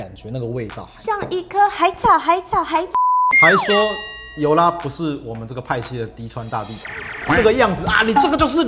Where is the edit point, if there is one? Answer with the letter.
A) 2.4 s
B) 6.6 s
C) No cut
C